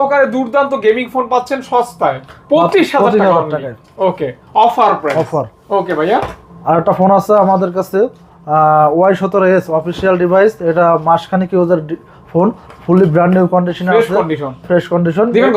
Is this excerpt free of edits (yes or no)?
yes